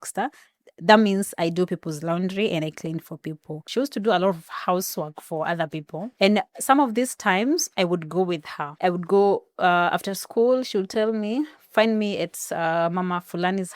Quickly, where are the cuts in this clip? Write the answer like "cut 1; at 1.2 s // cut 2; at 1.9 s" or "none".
cut 1; at 3.6 s // cut 2; at 6.0 s // cut 3; at 8.6 s

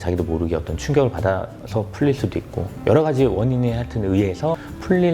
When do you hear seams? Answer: none

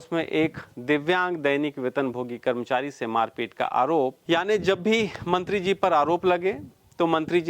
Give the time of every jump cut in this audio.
cut 1; at 4.2 s

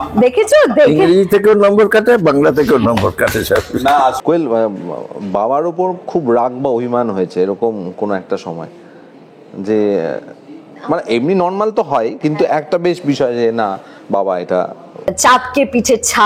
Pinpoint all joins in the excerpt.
cut 1; at 4.2 s // cut 2; at 15.1 s

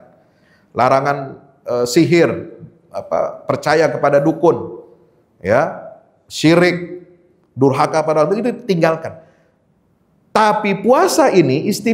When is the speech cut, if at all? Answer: none

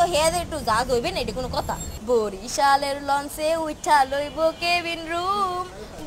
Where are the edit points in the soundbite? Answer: cut 1; at 1.5 s

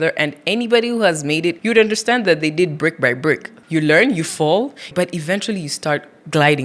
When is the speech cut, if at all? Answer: cut 1; at 1.6 s // cut 2; at 3.5 s // cut 3; at 4.9 s

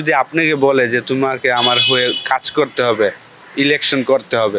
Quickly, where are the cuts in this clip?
none

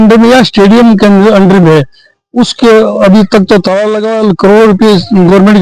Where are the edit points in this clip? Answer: none

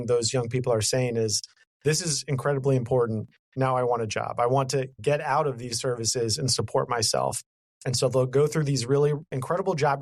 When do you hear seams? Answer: none

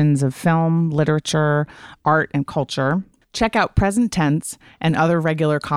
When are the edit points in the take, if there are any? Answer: cut 1; at 3.2 s

